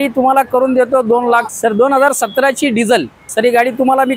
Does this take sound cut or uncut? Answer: cut